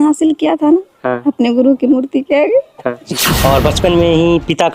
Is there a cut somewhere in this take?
yes; 1 cut; at 3.0 s

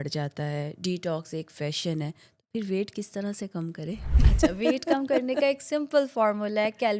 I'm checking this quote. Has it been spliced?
no; 0 cuts

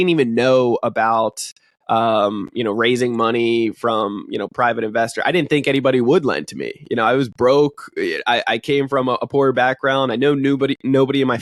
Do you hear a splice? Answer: no; 0 cuts

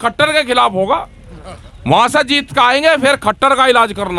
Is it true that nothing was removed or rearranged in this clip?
yes; 0 cuts

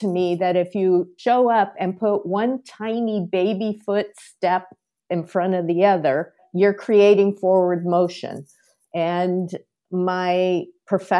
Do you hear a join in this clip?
yes; 1 cut; at 1.1 s

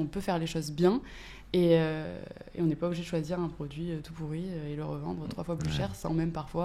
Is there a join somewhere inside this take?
no; 0 cuts

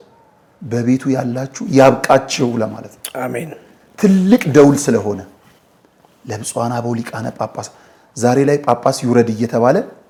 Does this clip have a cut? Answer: no; 0 cuts

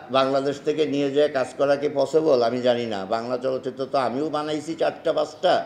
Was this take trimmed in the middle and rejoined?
no; 0 cuts

